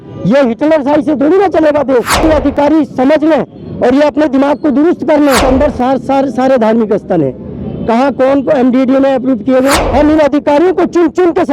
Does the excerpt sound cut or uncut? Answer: cut